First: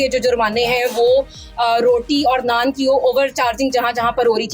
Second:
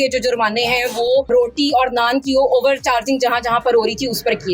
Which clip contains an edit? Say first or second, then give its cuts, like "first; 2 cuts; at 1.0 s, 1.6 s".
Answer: second; 1 cut; at 1.3 s